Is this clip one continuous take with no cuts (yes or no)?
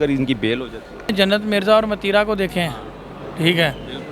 no